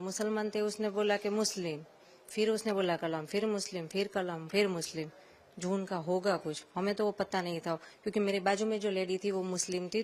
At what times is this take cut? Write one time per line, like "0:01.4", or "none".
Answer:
none